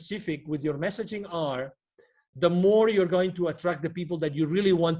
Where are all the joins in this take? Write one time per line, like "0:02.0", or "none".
none